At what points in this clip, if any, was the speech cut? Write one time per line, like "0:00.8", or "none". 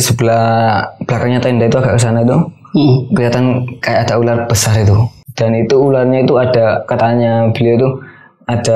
0:05.2